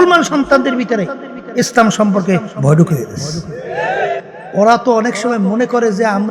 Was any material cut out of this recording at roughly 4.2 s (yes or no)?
yes